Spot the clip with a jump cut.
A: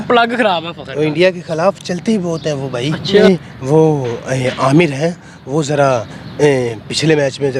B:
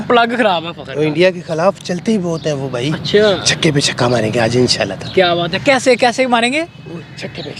A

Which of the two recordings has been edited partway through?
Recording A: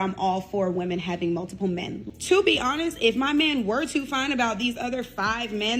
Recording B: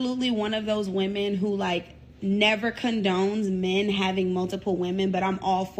A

